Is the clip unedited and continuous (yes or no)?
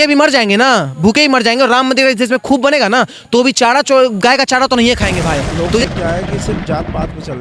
no